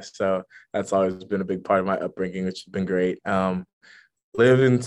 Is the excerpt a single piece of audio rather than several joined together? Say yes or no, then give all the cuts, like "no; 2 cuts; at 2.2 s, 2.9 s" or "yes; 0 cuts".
yes; 0 cuts